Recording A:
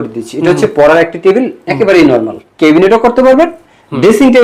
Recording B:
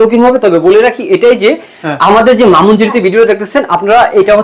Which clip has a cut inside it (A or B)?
A